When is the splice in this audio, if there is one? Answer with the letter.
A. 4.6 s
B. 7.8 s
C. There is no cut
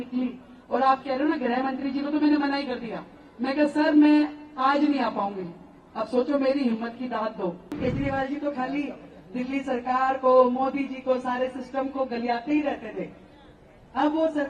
B